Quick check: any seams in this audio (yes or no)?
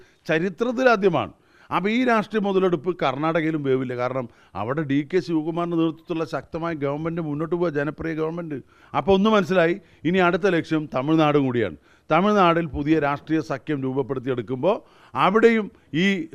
yes